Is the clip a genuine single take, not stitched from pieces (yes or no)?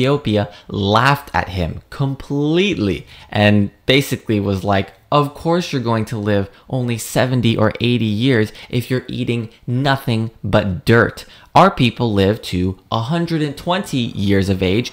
yes